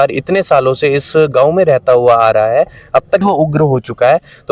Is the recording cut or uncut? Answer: cut